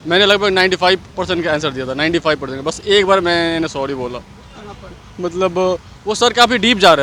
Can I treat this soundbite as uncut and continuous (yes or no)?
yes